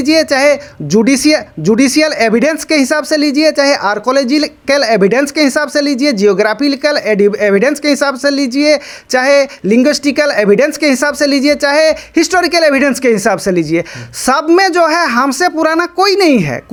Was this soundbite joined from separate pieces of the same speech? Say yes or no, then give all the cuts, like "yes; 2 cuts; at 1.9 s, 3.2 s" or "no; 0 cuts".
no; 0 cuts